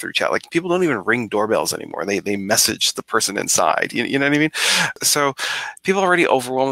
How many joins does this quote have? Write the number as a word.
one